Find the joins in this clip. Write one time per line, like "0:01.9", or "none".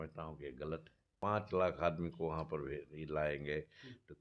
0:01.0